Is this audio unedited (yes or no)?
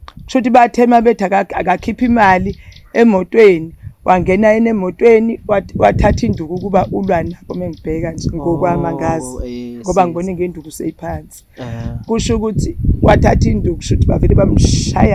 yes